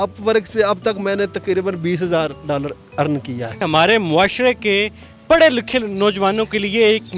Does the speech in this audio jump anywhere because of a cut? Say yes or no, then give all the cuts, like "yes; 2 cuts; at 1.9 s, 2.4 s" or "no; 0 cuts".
yes; 1 cut; at 3.6 s